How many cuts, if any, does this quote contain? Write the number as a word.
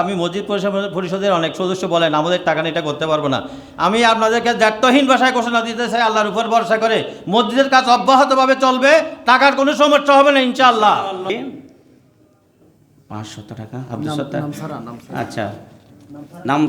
one